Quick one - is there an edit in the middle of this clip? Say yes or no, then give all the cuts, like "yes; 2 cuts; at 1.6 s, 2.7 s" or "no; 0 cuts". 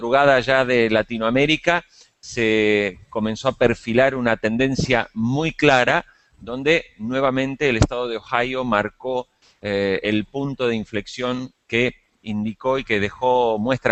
no; 0 cuts